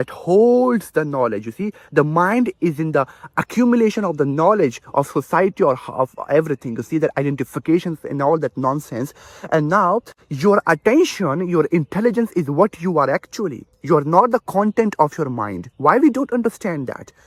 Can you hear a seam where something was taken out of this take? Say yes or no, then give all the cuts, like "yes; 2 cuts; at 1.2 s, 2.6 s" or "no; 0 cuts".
no; 0 cuts